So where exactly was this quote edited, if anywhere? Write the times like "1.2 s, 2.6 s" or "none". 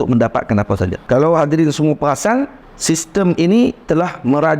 1.0 s, 2.6 s